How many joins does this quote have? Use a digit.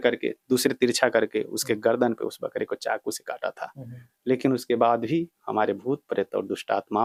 0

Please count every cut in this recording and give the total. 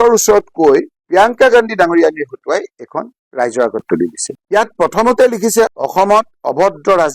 1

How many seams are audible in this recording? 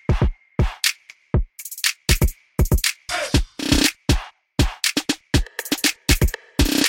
1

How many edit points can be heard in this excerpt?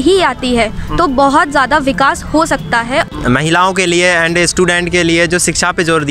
1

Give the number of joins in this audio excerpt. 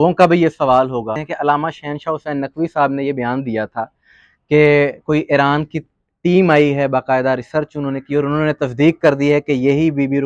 0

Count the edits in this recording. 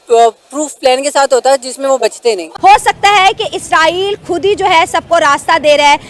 1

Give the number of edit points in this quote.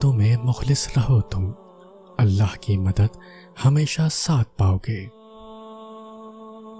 1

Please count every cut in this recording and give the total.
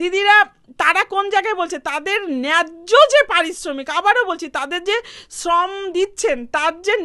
0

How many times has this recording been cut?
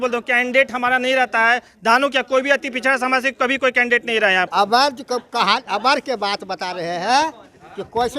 1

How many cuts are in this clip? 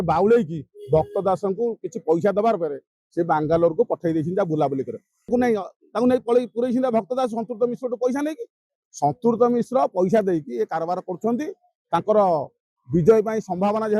1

